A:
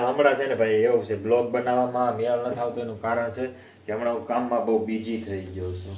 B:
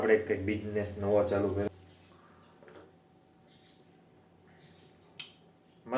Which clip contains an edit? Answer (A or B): B